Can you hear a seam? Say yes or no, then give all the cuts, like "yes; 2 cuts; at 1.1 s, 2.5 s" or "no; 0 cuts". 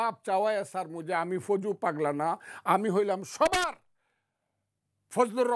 no; 0 cuts